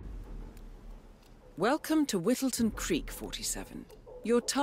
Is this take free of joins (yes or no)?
no